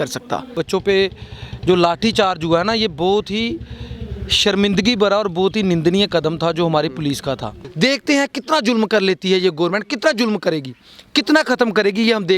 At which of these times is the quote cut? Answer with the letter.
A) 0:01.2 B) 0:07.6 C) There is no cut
B